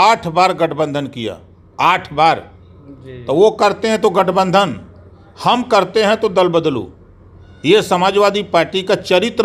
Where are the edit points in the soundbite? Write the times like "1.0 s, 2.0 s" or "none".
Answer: none